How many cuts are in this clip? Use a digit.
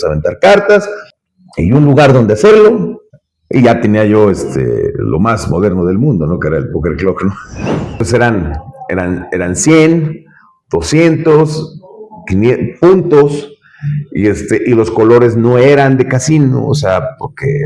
1